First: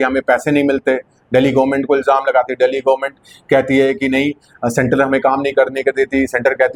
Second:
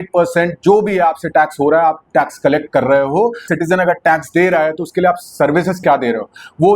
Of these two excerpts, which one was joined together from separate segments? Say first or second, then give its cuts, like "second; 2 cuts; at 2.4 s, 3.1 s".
second; 1 cut; at 3.4 s